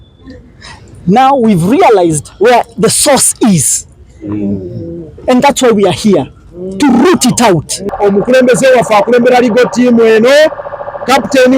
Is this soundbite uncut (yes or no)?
no